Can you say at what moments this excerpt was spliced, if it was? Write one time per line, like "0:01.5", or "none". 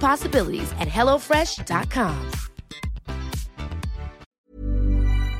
0:04.3